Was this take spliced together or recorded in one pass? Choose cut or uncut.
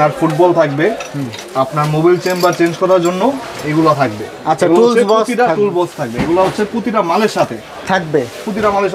uncut